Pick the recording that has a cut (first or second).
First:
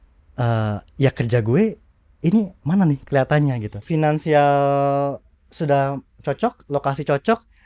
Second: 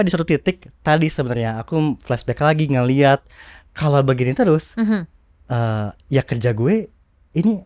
first